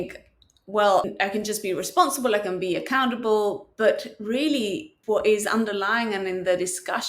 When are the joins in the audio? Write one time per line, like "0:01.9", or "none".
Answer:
0:01.1
0:04.9

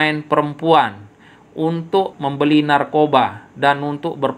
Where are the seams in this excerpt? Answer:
0:02.1

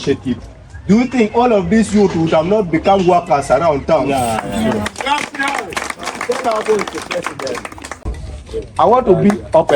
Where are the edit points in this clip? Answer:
0:08.1

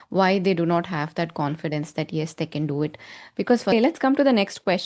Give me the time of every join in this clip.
0:03.7

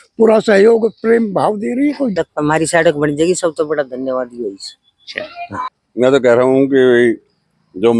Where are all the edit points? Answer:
0:02.2
0:05.9

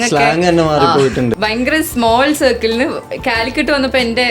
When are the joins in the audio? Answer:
0:01.3

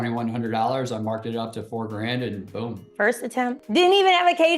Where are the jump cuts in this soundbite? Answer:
0:02.8
0:03.6

